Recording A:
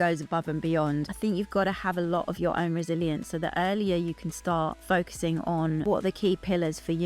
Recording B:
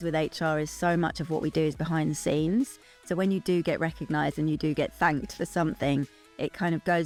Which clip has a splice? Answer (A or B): A